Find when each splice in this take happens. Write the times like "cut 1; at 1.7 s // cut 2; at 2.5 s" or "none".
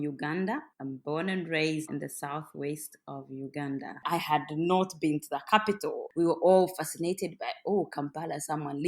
cut 1; at 1.9 s // cut 2; at 4.0 s